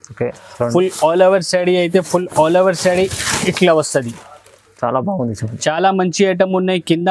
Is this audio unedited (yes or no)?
yes